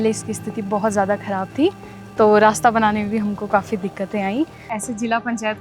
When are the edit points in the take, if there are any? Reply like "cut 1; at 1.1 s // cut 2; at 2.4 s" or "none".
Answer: cut 1; at 4.7 s